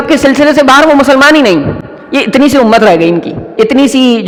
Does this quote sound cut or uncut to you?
uncut